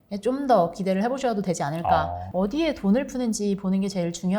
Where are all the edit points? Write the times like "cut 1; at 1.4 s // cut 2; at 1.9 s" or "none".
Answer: cut 1; at 2.2 s